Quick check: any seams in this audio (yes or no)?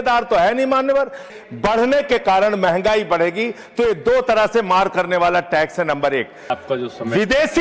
yes